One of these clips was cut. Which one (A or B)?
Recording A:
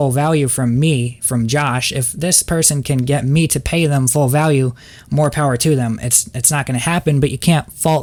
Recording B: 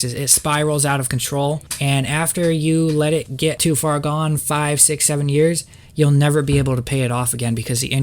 B